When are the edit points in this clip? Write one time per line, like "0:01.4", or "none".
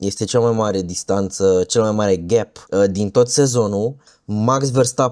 0:04.0